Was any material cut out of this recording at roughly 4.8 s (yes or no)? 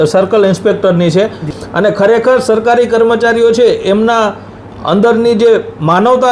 no